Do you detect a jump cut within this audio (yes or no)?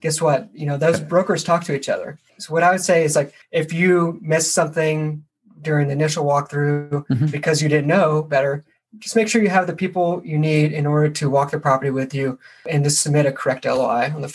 yes